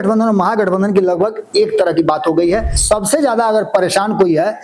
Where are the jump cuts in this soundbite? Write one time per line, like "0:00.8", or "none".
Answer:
0:02.7